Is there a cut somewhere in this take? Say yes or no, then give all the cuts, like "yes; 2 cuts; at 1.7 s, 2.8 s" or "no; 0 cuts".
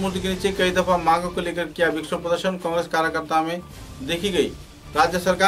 no; 0 cuts